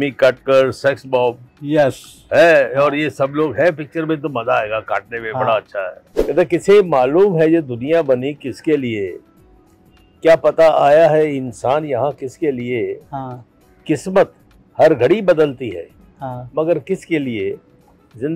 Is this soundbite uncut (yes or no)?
no